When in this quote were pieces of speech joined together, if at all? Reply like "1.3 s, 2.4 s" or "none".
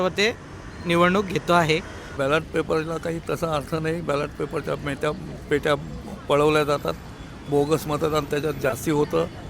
2.1 s